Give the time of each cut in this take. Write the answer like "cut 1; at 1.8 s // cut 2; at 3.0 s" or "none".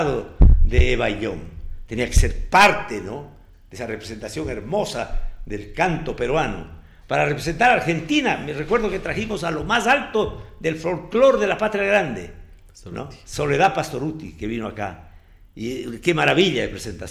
none